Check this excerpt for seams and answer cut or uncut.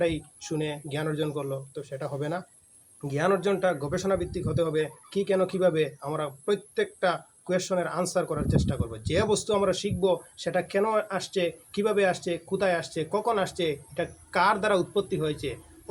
uncut